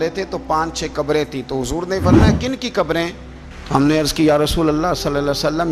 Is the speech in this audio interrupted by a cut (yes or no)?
no